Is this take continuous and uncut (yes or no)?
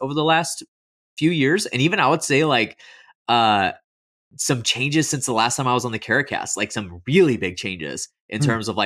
yes